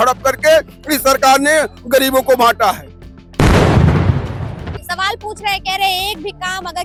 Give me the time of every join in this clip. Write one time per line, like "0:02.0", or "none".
none